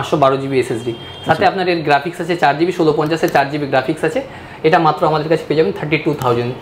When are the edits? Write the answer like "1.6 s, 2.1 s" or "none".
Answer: none

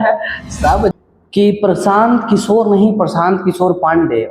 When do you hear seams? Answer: 0.9 s

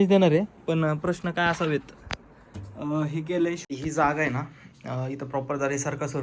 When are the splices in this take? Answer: 3.7 s

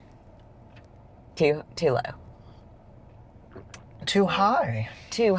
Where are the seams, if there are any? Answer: none

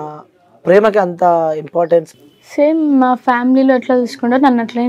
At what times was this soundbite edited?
2.1 s

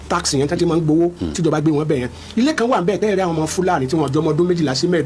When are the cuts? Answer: none

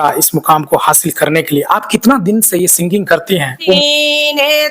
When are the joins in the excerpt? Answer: 3.8 s

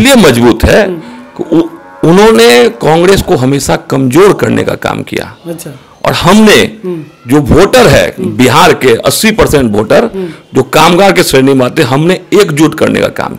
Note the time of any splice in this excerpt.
none

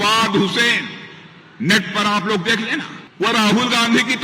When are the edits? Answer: 3.0 s

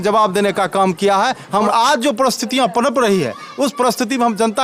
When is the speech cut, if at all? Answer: 1.7 s

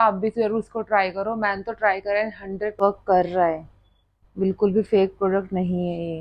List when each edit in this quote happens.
2.8 s

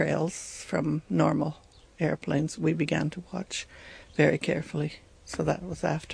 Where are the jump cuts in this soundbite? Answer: none

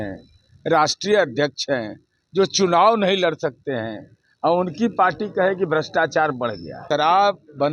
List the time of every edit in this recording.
6.7 s

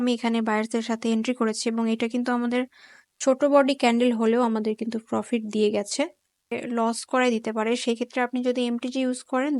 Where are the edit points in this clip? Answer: 6.6 s

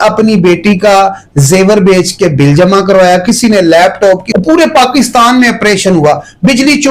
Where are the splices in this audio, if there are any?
4.3 s

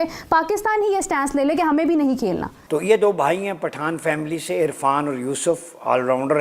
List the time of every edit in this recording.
2.5 s

